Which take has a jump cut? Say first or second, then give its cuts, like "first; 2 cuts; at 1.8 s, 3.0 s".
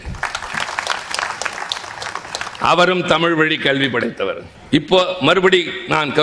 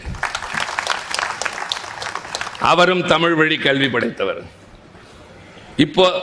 first; 1 cut; at 4.5 s